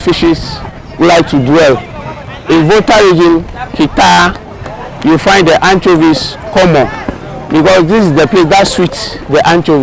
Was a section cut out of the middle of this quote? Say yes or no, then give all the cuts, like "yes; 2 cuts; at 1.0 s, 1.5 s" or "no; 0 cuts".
yes; 1 cut; at 7.3 s